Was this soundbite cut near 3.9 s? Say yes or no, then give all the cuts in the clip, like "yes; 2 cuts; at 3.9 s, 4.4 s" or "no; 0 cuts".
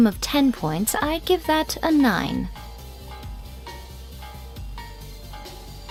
no; 0 cuts